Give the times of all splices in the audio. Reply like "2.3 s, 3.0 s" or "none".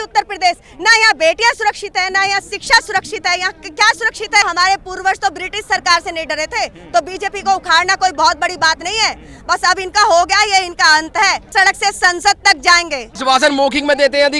4.4 s, 11.5 s, 13.1 s

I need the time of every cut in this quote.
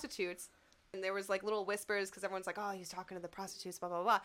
1.0 s

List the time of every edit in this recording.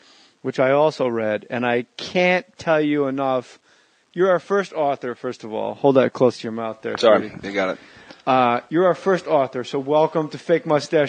none

